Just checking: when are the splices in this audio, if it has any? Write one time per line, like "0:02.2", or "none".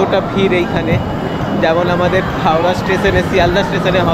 none